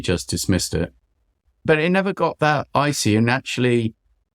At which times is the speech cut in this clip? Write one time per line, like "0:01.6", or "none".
0:01.4